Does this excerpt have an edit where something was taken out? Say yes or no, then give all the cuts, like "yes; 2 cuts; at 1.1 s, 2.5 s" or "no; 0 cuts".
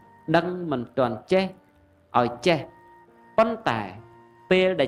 no; 0 cuts